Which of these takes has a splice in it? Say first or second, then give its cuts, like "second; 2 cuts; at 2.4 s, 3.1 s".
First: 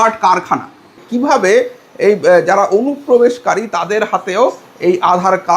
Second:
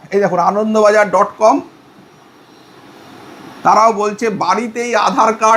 first; 1 cut; at 1.0 s